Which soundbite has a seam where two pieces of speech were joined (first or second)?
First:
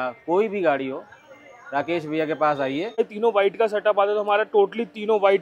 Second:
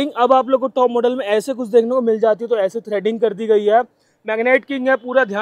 first